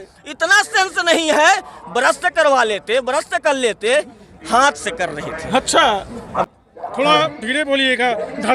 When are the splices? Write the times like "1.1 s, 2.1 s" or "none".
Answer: 6.5 s